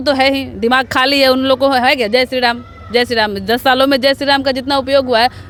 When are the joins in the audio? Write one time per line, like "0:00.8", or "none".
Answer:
none